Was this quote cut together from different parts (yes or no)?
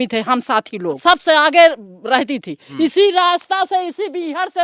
yes